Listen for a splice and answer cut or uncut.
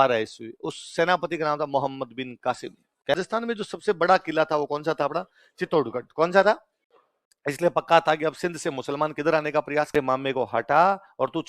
cut